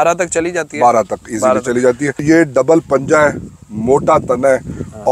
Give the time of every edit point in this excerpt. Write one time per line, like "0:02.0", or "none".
0:02.2